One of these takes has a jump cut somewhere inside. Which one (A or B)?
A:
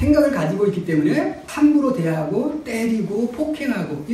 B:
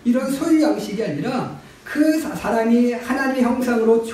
A